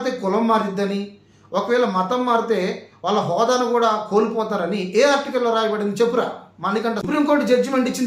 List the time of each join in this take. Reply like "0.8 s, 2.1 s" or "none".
7.0 s